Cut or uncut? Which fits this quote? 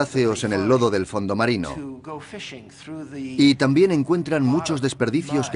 cut